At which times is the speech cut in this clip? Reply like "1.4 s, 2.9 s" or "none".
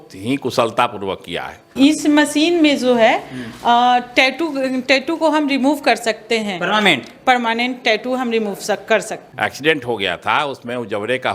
1.6 s, 9.2 s